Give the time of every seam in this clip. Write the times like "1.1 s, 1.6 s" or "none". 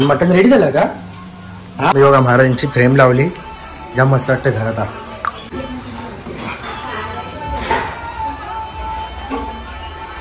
1.9 s, 5.5 s